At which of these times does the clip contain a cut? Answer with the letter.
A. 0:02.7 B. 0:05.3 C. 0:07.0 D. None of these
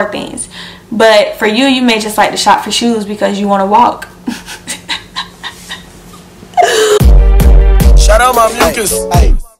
C